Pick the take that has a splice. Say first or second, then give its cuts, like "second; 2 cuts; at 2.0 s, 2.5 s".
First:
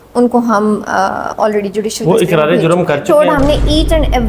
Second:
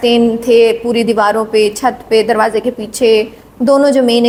first; 1 cut; at 3.1 s